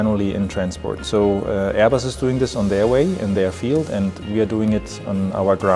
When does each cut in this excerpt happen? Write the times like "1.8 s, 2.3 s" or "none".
none